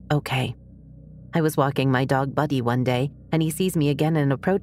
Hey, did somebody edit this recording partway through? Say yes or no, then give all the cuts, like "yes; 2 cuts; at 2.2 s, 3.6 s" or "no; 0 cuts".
no; 0 cuts